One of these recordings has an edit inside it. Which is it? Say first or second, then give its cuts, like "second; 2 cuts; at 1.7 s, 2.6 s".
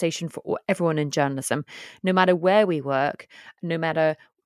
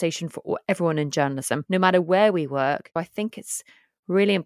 second; 2 cuts; at 1.6 s, 3.0 s